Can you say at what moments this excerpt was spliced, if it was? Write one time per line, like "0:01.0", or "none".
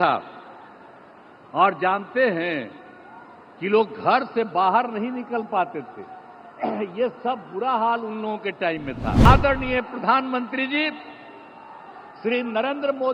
0:09.3